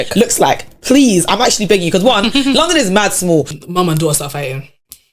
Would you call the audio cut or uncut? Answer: cut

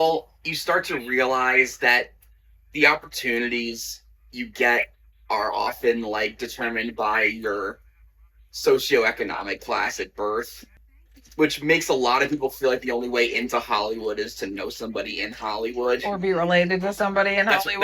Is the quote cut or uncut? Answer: uncut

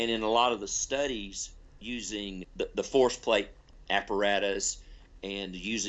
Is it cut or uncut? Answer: cut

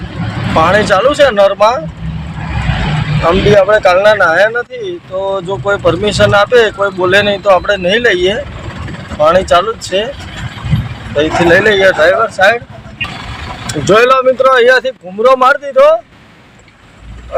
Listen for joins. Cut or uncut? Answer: uncut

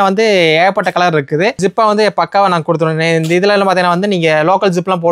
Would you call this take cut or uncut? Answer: uncut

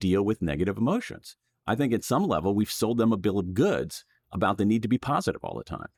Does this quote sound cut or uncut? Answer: uncut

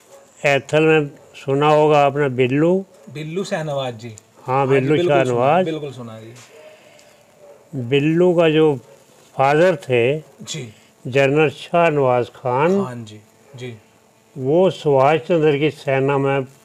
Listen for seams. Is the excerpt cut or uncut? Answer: uncut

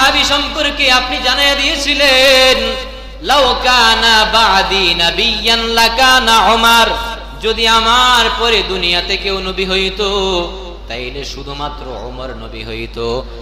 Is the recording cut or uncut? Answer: uncut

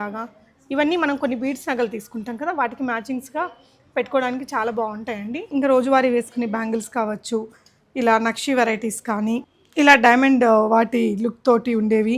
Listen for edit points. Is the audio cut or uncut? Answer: cut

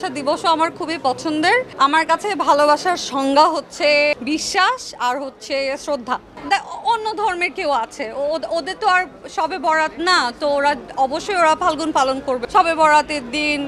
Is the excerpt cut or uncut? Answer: cut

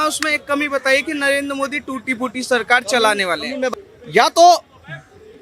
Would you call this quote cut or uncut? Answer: cut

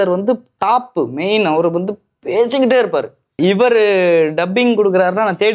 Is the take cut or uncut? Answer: cut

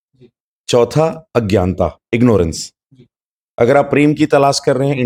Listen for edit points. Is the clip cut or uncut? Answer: uncut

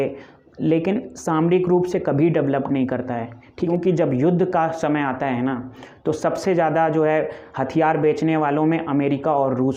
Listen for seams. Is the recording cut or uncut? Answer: cut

